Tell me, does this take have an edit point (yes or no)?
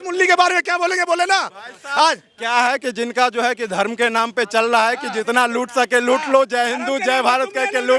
no